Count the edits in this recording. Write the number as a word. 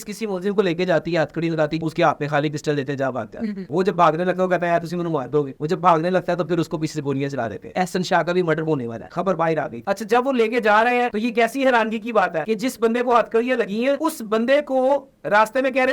two